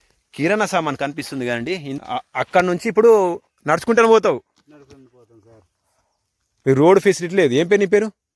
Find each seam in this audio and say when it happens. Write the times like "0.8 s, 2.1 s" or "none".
2.0 s